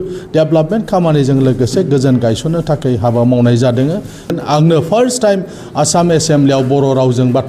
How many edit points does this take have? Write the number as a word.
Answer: one